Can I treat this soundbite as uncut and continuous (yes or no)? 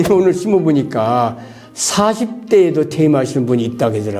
yes